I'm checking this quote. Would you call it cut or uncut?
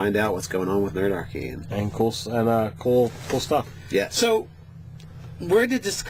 uncut